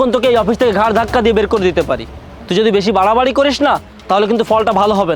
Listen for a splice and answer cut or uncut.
uncut